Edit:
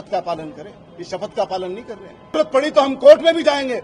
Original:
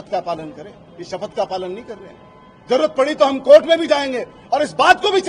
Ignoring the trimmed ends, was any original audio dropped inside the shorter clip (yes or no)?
yes